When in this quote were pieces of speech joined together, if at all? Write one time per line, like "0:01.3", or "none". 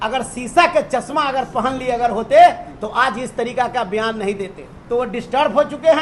0:04.7